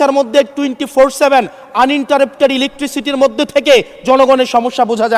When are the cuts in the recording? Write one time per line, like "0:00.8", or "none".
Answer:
none